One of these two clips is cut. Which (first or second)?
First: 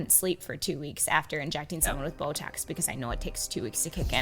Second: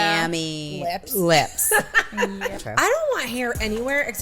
second